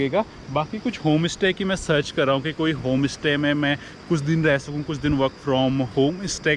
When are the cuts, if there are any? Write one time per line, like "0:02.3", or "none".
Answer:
none